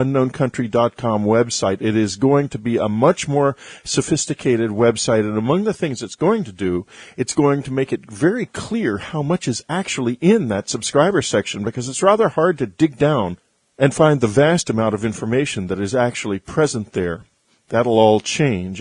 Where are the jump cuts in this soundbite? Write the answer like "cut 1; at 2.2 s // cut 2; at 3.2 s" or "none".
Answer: cut 1; at 3.4 s